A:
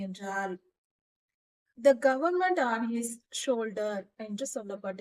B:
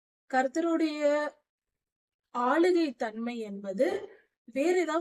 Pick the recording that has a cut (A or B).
A